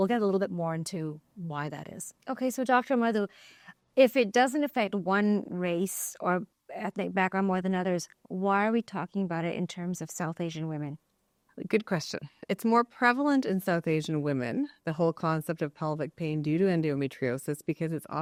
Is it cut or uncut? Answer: uncut